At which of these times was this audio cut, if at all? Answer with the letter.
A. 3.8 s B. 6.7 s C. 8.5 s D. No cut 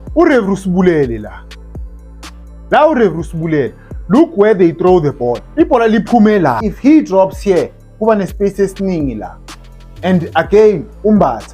B